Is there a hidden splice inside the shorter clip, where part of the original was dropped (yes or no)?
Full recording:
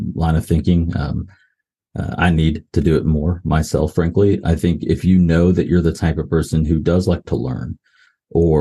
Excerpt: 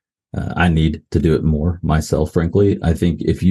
no